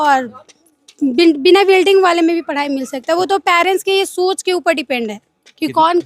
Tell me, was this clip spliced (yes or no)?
no